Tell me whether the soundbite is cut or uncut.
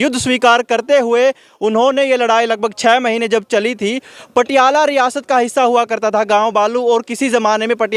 cut